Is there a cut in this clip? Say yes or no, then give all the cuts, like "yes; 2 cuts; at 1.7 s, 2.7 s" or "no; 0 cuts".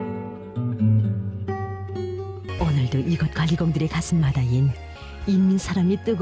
yes; 2 cuts; at 2.4 s, 5.1 s